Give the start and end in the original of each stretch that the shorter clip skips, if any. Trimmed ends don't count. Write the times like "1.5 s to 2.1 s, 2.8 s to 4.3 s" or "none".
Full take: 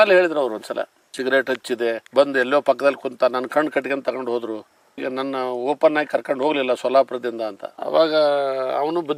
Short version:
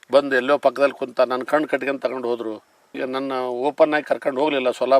none